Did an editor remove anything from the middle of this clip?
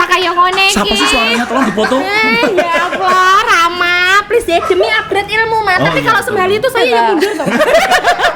no; 0 cuts

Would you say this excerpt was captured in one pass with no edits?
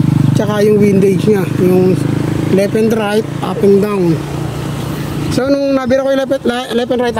yes; 0 cuts

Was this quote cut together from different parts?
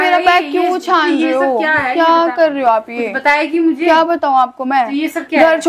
no; 0 cuts

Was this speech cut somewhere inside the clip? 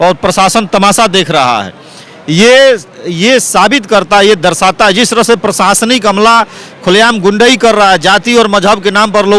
no; 0 cuts

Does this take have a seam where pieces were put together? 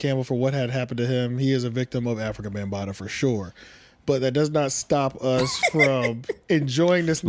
no; 0 cuts

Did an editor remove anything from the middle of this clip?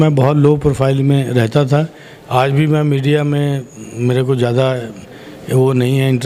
no; 0 cuts

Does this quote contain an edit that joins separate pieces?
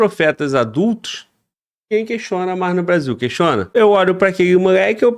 yes; 1 cut; at 3.6 s

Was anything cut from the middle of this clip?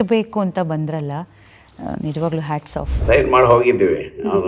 yes; 1 cut; at 3.0 s

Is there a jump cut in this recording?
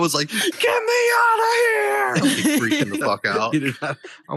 no; 0 cuts

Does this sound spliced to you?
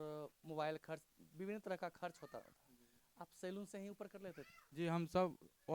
no; 0 cuts

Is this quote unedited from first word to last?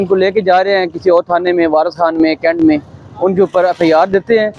yes; 0 cuts

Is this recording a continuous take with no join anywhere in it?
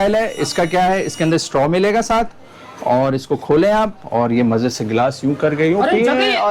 yes; 0 cuts

